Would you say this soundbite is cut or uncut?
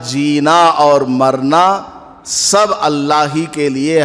uncut